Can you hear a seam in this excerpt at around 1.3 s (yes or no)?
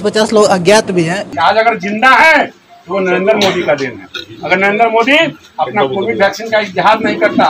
yes